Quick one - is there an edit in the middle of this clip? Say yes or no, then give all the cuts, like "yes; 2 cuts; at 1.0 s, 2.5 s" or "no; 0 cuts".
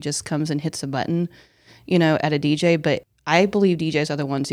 yes; 1 cut; at 3.1 s